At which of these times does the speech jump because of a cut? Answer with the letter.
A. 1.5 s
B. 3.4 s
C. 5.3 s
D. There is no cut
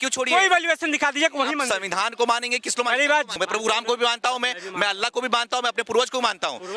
B